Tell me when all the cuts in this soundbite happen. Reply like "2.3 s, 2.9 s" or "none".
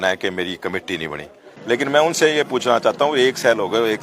1.5 s